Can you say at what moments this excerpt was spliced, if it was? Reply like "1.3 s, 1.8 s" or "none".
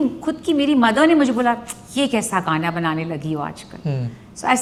none